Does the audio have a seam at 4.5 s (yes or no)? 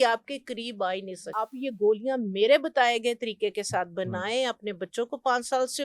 no